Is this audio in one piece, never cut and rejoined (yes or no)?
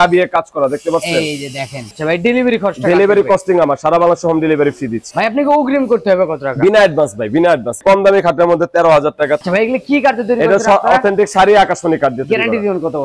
no